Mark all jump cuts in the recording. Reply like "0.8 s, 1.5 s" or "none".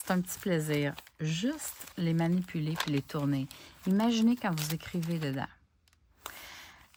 none